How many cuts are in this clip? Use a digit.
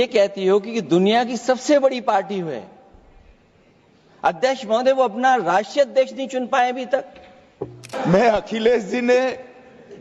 1